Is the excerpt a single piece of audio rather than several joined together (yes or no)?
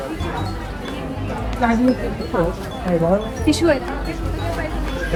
yes